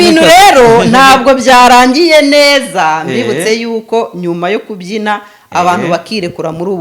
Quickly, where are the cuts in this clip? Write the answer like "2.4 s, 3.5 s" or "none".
none